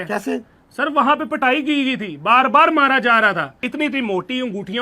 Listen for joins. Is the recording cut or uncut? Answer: cut